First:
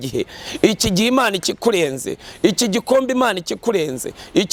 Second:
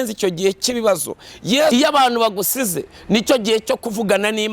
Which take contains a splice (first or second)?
second